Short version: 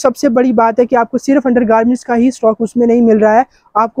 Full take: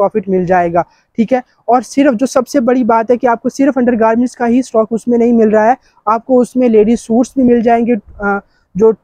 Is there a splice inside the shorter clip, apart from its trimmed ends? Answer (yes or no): no